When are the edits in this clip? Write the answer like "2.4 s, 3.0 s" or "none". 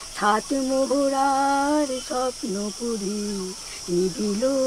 none